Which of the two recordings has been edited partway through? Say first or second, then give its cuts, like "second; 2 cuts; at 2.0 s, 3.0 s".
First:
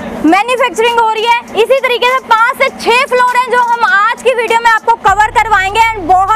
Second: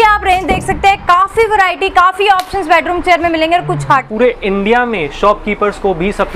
second; 1 cut; at 4.1 s